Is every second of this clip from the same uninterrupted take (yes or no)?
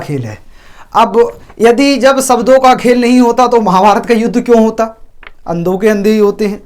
yes